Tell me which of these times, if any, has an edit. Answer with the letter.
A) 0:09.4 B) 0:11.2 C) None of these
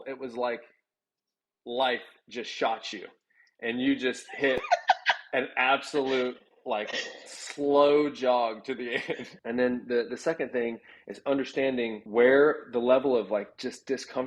A